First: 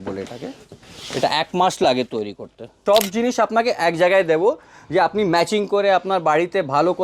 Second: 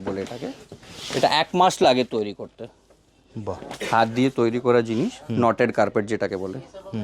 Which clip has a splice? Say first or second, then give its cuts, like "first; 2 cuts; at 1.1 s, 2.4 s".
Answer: first; 1 cut; at 2.7 s